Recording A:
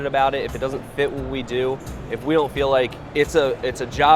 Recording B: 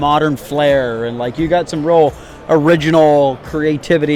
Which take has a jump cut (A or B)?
A